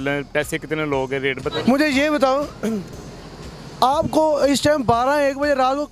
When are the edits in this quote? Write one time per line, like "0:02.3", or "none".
0:01.6